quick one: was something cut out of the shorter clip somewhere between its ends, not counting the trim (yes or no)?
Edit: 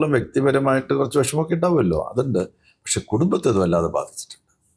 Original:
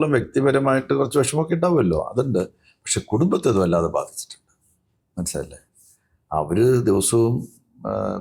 no